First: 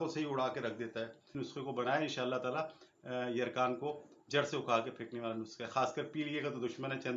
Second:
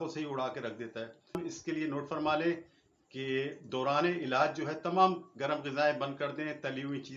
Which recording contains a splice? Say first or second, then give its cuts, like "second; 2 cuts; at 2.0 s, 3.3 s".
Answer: first; 1 cut; at 1.3 s